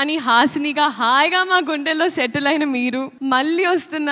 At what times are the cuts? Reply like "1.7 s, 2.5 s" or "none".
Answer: 3.1 s